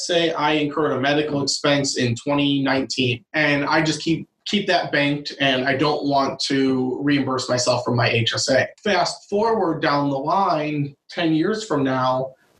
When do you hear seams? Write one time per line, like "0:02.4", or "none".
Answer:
0:03.2
0:04.3
0:08.7